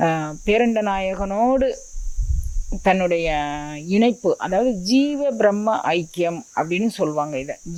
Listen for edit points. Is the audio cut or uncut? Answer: uncut